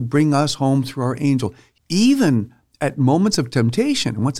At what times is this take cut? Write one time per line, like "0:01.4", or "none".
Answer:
0:01.6

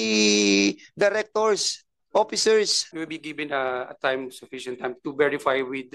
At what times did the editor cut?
0:02.8

